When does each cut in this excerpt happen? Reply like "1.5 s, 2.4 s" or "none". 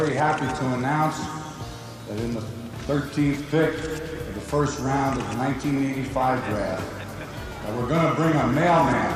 none